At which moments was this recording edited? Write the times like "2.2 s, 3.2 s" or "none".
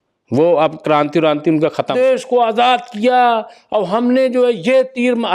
1.9 s